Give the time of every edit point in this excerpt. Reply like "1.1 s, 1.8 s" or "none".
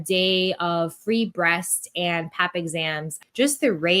3.1 s